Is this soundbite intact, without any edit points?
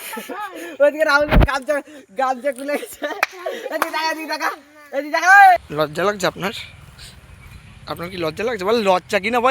no; 1 cut; at 5.7 s

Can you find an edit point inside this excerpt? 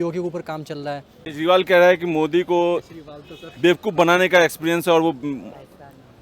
yes; 1 cut; at 1.2 s

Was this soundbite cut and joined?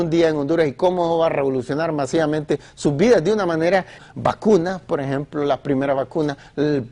no; 0 cuts

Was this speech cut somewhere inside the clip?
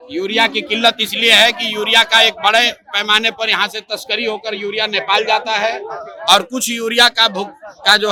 no; 0 cuts

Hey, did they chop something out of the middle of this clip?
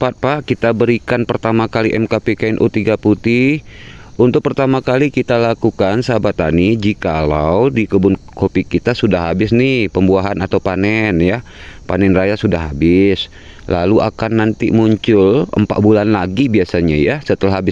no; 0 cuts

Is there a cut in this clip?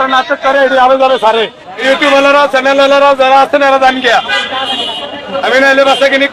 no; 0 cuts

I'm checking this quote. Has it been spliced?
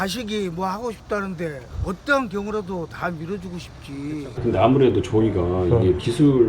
yes; 2 cuts; at 1.7 s, 4.4 s

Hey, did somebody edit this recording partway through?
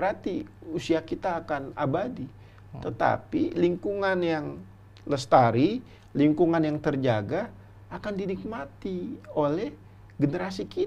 no; 0 cuts

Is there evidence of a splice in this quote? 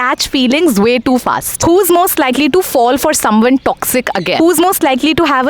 yes; 2 cuts; at 1.5 s, 4.4 s

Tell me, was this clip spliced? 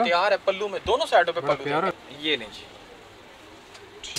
yes; 1 cut; at 2.0 s

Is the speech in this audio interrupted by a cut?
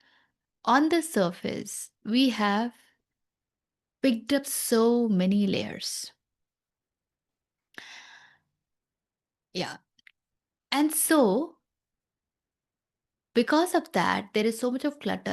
no; 0 cuts

